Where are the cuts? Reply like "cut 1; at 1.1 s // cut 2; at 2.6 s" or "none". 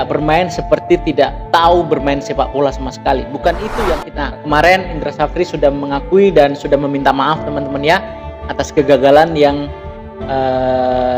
cut 1; at 4.1 s